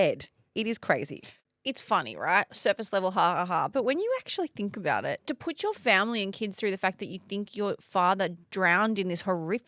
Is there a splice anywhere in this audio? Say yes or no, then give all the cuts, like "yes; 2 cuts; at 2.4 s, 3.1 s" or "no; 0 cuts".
yes; 1 cut; at 5.2 s